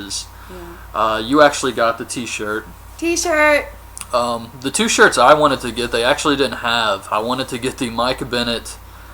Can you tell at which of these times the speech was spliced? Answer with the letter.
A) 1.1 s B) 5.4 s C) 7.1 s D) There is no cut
B